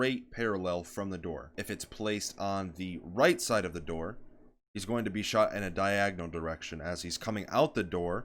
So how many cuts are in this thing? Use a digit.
1